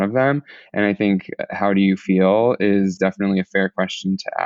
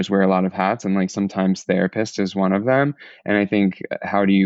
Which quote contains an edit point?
first; 1 cut; at 2.9 s

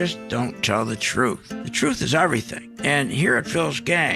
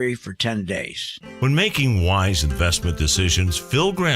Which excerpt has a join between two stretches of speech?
second; 1 cut; at 1.0 s

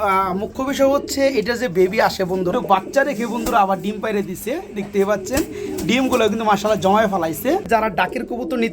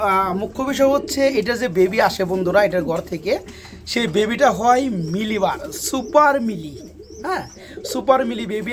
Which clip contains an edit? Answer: first; 2 cuts; at 2.5 s, 7.7 s

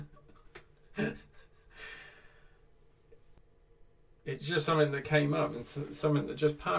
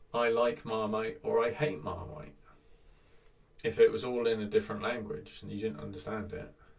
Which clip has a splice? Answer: first; 1 cut; at 3.4 s

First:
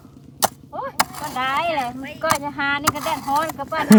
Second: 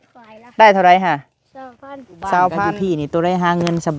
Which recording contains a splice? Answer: second; 1 cut; at 2.8 s

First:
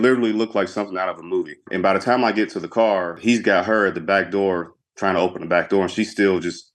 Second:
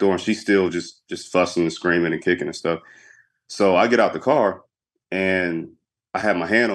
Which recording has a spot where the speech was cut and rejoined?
first; 2 cuts; at 1.6 s, 3.2 s

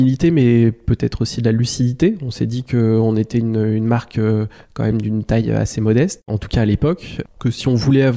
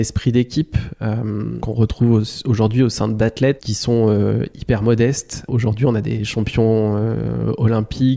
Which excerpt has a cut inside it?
second; 3 cuts; at 1.6 s, 3.7 s, 6.2 s

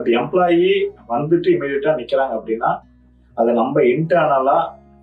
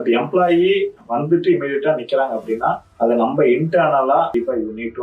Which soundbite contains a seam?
second; 2 cuts; at 2.9 s, 4.3 s

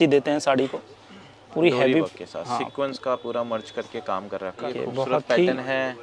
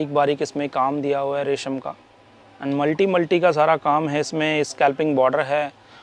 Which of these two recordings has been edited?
first; 1 cut; at 4.6 s

